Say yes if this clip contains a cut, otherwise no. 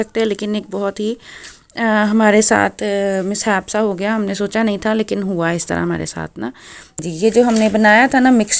yes